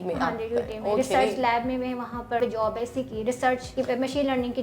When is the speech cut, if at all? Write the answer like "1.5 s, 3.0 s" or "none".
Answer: 2.4 s, 3.7 s